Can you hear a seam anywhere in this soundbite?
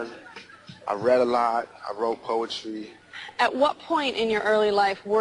yes; 1 cut; at 4.3 s

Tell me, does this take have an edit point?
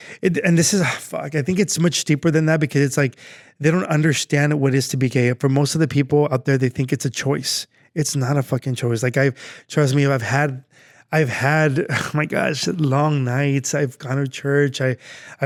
no; 0 cuts

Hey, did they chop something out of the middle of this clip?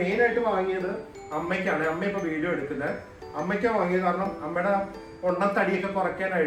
no; 0 cuts

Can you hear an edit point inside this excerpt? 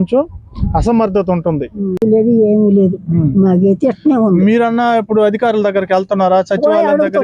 yes; 1 cut; at 2.0 s

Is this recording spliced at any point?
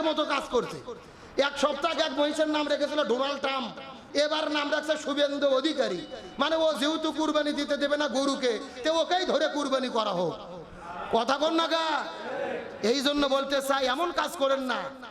yes; 1 cut; at 4.0 s

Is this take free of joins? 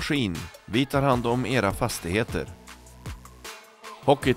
yes; 0 cuts

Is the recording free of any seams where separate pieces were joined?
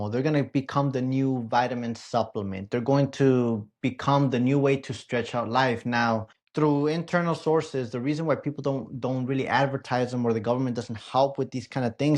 no; 1 cut; at 6.4 s

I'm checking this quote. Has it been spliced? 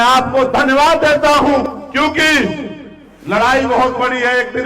yes; 1 cut; at 1.7 s

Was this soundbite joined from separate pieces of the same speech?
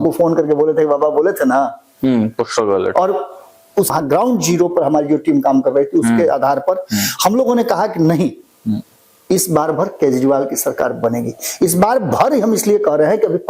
yes; 1 cut; at 3.9 s

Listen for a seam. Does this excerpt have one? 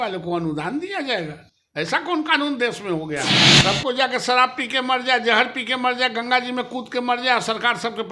yes; 1 cut; at 3.4 s

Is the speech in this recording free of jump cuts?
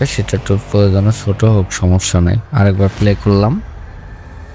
no; 1 cut; at 2.4 s

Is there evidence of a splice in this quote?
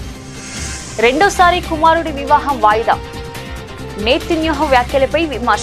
no; 0 cuts

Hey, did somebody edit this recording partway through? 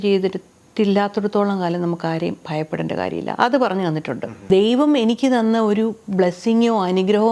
yes; 1 cut; at 4.3 s

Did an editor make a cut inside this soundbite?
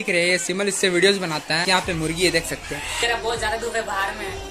yes; 2 cuts; at 1.6 s, 3.0 s

